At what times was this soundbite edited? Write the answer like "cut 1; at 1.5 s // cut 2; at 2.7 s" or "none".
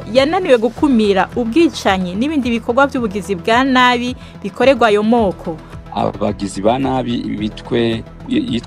cut 1; at 5.8 s